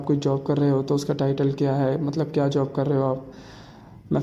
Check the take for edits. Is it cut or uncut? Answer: uncut